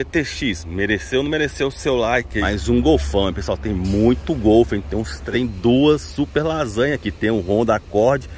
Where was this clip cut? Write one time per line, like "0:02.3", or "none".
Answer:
0:02.3
0:05.2